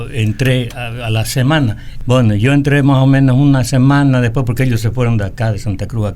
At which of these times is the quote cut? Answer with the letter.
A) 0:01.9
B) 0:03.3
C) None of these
A